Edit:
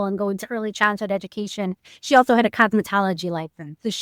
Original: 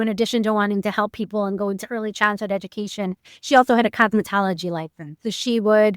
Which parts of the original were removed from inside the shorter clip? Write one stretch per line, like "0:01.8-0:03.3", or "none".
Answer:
none